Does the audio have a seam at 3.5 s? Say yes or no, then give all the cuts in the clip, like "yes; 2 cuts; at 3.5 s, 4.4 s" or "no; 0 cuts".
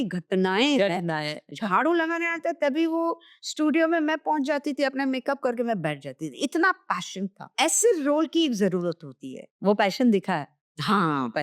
no; 2 cuts; at 1.3 s, 7.5 s